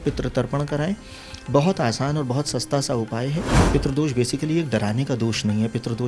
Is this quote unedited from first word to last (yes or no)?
no